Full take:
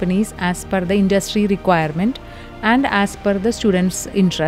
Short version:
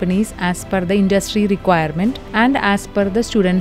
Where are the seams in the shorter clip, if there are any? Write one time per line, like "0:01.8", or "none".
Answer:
0:02.2